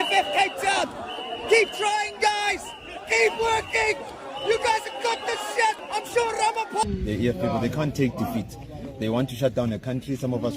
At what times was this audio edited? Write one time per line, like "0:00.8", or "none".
0:06.8